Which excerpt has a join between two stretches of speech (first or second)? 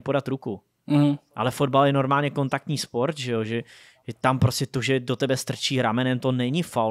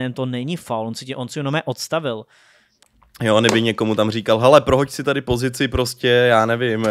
second